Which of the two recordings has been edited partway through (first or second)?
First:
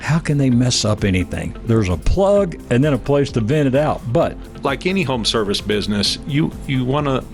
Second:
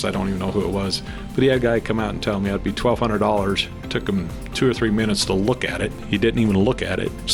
first